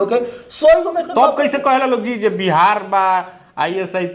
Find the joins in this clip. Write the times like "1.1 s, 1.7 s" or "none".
1.1 s